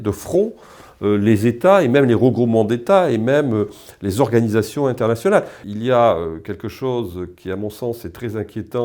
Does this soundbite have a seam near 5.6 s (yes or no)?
yes